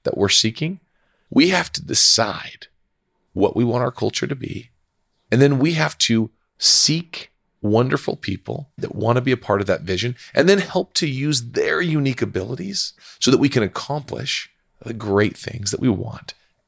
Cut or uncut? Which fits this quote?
cut